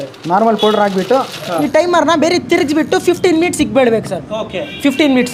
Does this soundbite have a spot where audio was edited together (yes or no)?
no